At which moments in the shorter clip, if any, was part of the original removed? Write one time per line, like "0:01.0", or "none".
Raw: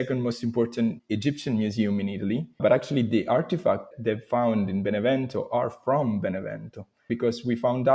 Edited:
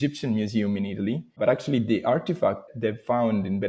none